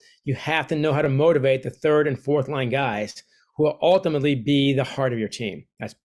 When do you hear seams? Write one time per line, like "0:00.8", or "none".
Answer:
none